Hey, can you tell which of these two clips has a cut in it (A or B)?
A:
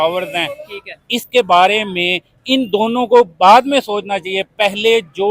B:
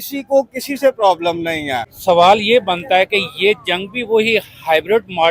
B